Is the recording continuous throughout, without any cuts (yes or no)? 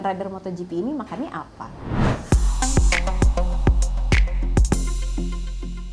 yes